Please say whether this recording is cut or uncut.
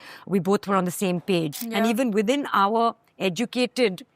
cut